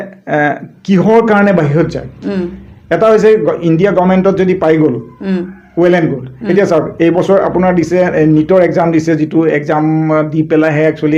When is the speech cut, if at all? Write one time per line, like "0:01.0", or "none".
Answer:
none